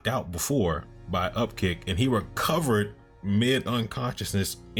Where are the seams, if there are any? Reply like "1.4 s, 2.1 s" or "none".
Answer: none